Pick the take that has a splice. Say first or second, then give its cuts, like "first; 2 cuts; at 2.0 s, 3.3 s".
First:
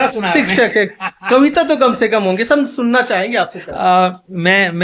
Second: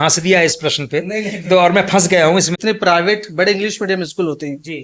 second; 1 cut; at 2.5 s